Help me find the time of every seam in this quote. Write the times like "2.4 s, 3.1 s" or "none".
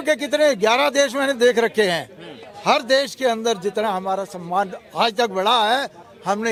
none